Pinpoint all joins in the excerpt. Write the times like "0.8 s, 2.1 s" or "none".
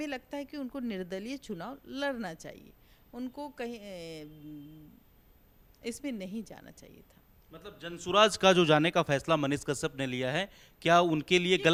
none